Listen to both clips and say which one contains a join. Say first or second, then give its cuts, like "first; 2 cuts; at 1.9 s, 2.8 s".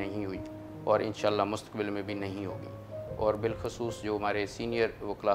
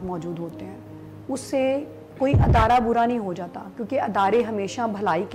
first; 1 cut; at 3.0 s